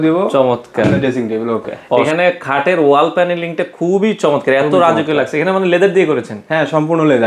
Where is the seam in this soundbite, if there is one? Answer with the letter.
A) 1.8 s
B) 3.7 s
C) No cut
A